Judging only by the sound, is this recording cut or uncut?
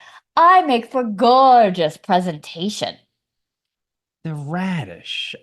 uncut